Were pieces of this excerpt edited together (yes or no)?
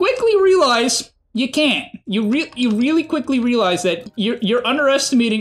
no